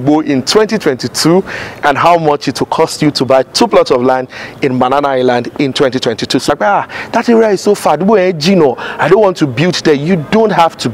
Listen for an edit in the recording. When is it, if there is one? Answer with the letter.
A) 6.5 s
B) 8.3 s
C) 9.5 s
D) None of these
A